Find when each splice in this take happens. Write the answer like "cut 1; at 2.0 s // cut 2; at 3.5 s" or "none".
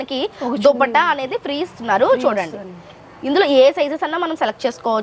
none